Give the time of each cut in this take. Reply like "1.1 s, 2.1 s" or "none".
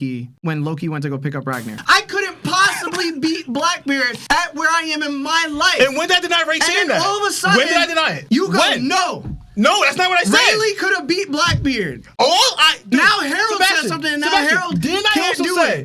1.8 s